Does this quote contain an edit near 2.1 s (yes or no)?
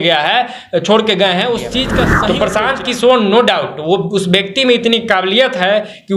yes